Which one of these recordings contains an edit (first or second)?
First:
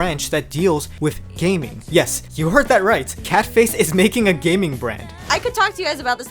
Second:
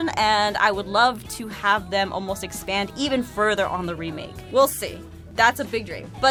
first